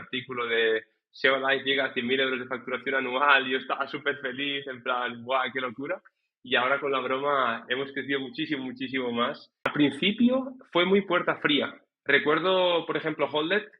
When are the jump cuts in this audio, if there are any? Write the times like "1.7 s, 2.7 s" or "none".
9.7 s